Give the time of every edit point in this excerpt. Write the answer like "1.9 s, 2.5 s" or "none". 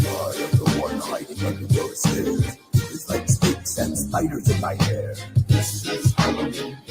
1.3 s, 4.8 s